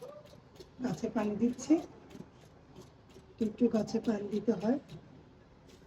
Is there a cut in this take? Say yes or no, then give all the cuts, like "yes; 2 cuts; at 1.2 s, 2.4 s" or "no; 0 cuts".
no; 0 cuts